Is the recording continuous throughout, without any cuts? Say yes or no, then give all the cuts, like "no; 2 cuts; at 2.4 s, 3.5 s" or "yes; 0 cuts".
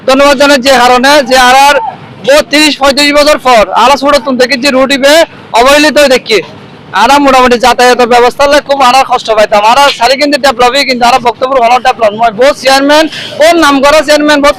yes; 0 cuts